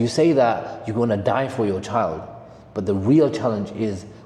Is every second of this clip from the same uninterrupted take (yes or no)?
yes